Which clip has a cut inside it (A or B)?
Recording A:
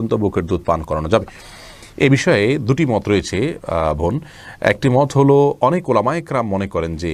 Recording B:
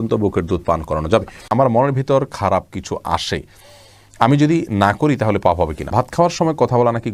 B